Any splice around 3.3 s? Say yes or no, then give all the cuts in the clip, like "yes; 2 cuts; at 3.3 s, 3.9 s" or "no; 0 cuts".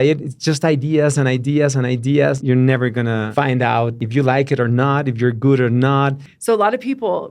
yes; 4 cuts; at 2.4 s, 3.3 s, 4.0 s, 6.3 s